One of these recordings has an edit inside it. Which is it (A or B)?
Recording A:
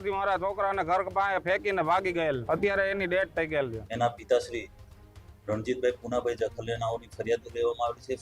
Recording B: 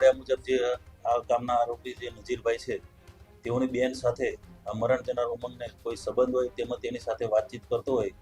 A